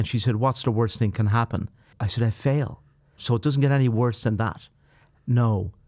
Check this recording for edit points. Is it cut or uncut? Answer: cut